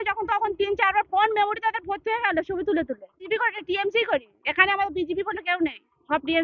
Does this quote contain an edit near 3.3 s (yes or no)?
yes